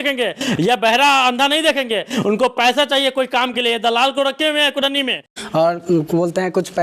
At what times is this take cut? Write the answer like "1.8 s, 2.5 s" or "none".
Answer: 5.2 s